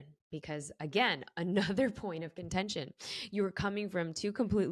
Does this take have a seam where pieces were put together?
no; 0 cuts

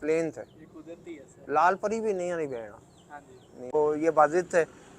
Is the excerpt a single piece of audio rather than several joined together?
no; 1 cut; at 3.7 s

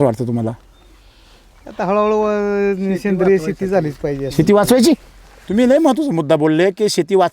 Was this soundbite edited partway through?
yes; 1 cut; at 5.3 s

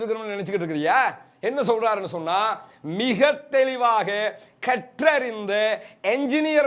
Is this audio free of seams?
yes; 0 cuts

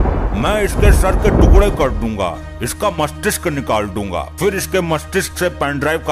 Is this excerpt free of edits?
yes; 0 cuts

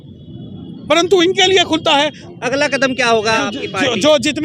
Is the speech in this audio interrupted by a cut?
yes; 2 cuts; at 2.2 s, 3.4 s

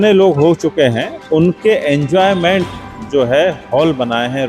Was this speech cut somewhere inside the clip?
yes; 1 cut; at 1.1 s

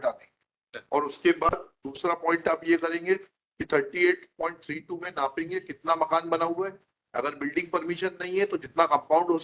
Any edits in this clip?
no; 0 cuts

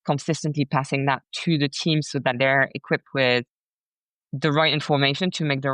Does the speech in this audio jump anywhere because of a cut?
no; 0 cuts

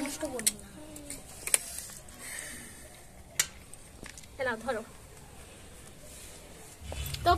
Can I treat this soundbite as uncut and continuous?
yes; 0 cuts

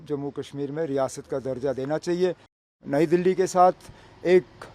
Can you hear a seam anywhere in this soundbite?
yes; 1 cut; at 2.7 s

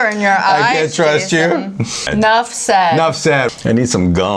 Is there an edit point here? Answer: yes; 2 cuts; at 2.1 s, 3.5 s

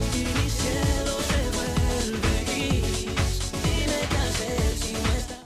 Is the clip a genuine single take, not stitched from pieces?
no; 1 cut; at 2.4 s

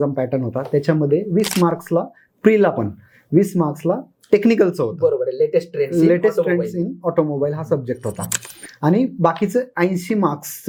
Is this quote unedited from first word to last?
yes; 0 cuts

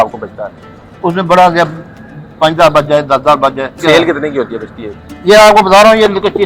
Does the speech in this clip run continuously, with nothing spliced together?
no; 1 cut; at 3.8 s

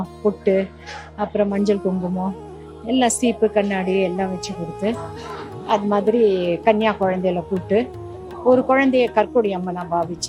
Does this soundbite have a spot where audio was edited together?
no; 0 cuts

